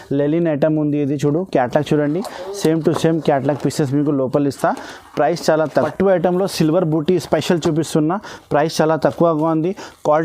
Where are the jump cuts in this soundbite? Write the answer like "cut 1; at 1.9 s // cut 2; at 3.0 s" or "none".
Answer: cut 1; at 5.7 s